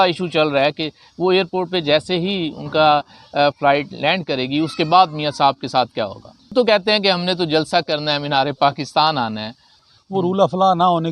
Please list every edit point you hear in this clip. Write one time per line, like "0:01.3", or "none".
0:06.5
0:09.7